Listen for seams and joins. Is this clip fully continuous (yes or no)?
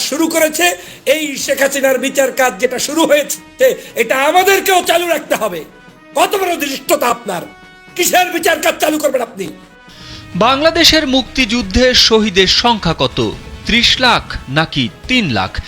no